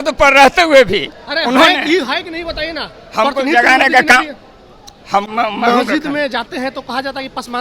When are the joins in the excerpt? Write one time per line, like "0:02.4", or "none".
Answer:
0:05.3